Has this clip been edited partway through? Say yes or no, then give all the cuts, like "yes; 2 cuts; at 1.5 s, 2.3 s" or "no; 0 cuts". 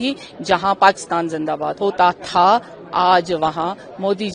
yes; 1 cut; at 1.7 s